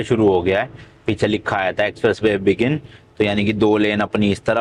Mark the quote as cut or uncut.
uncut